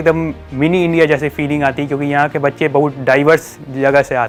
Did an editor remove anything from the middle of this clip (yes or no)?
no